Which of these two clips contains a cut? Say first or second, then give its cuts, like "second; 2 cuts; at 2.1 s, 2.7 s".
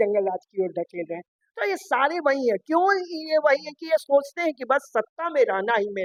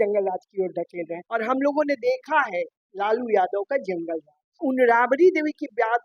second; 2 cuts; at 1.2 s, 4.6 s